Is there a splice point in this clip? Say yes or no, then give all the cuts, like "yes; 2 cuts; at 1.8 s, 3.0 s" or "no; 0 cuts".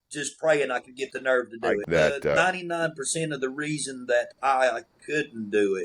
yes; 1 cut; at 1.8 s